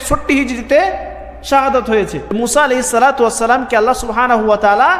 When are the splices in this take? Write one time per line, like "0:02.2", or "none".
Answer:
0:02.4